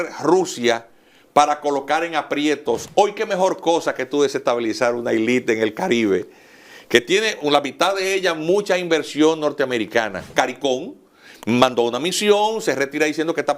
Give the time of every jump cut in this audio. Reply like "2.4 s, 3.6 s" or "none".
2.8 s, 10.3 s